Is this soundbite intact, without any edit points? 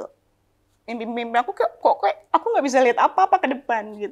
yes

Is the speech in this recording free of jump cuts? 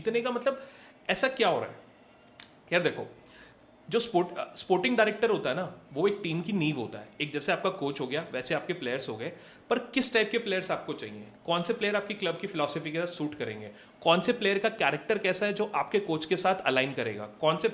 yes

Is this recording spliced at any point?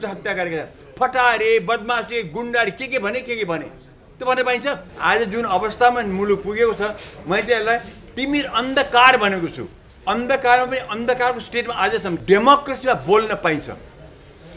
yes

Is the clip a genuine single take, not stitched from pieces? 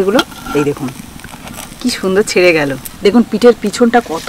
no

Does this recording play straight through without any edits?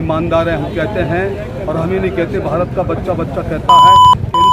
no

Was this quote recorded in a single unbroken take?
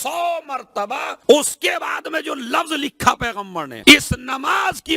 no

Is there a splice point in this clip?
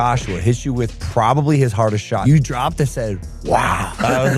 yes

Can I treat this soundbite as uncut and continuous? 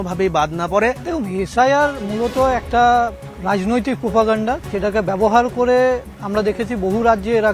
yes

